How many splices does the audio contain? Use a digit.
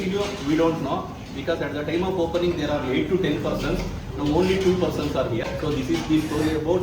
1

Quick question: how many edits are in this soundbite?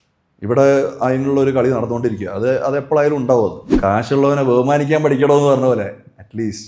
1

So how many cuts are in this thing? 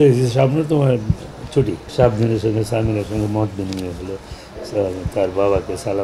1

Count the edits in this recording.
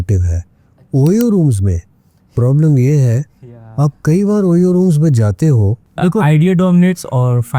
1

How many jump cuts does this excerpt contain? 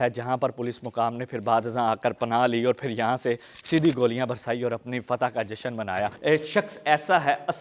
1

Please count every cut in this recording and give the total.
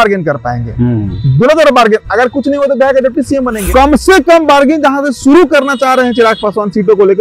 1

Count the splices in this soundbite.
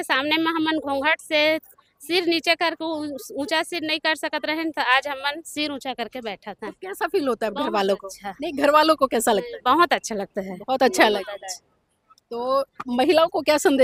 0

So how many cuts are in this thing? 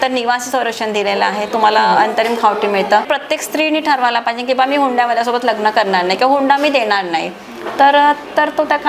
1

